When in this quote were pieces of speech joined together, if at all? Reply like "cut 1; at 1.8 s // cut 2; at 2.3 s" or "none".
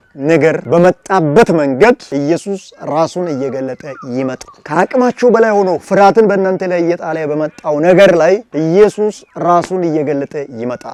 none